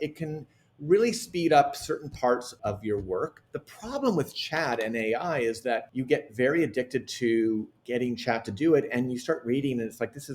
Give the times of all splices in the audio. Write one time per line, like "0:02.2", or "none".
0:02.5
0:05.9